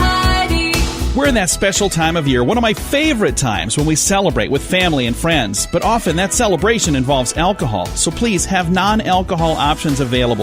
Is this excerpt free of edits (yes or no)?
no